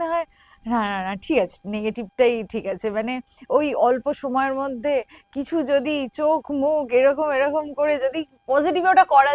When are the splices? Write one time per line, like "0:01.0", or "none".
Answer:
none

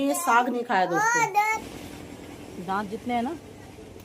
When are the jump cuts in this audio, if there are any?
0:01.7

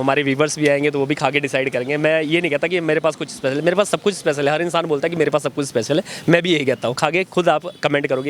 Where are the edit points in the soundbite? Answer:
0:07.0

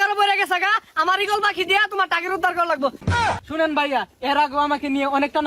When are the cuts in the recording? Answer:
0:03.0

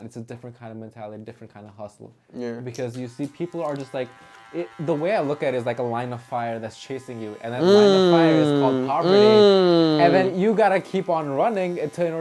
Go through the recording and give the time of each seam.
none

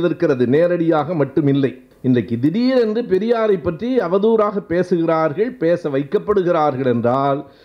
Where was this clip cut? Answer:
0:01.9

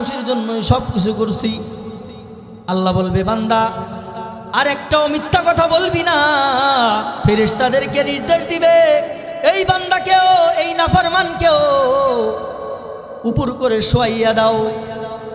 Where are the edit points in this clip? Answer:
none

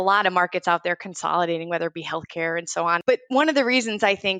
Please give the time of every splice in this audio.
0:03.0

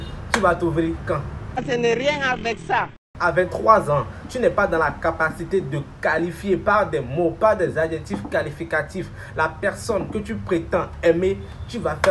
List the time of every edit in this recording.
none

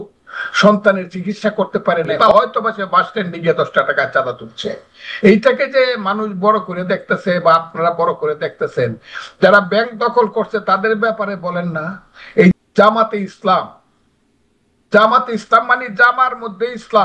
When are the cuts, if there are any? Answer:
0:02.2
0:12.5

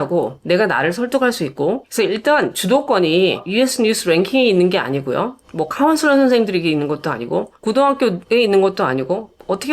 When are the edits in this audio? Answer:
0:01.9
0:08.2

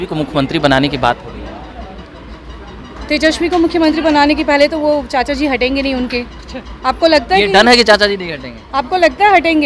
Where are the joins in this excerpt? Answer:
none

